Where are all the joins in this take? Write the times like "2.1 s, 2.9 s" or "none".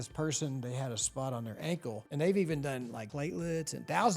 2.0 s, 3.0 s